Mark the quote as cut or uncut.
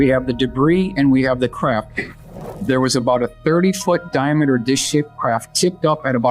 cut